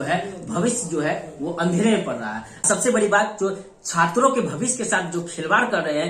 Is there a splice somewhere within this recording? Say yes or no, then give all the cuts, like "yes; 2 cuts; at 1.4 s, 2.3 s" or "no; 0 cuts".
yes; 1 cut; at 2.5 s